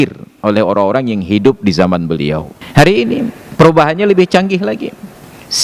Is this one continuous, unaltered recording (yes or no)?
no